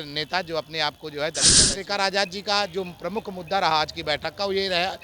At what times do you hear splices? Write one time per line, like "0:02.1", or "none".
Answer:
0:01.7